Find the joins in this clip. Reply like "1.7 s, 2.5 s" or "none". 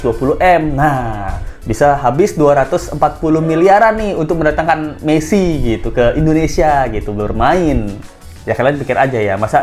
none